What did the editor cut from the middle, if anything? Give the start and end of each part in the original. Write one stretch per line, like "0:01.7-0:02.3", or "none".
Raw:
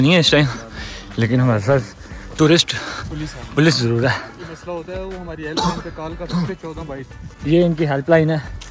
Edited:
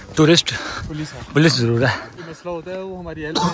none